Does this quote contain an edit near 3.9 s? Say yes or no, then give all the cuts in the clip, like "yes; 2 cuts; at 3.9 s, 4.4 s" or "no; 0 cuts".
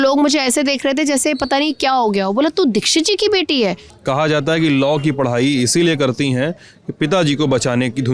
yes; 1 cut; at 3.9 s